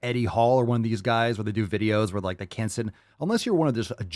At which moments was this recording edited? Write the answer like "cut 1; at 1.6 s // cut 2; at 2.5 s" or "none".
none